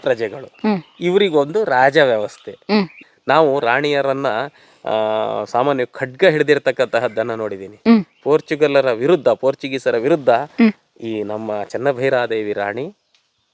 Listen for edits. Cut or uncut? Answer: cut